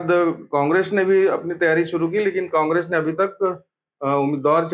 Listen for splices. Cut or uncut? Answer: uncut